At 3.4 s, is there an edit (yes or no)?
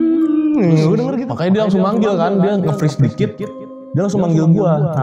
no